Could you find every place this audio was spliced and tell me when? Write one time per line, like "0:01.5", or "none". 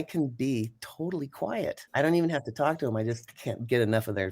0:01.8
0:03.3